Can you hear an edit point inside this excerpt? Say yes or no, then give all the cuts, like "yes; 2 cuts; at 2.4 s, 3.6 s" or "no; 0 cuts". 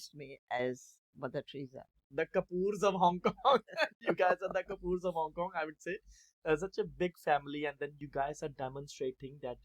yes; 1 cut; at 2.0 s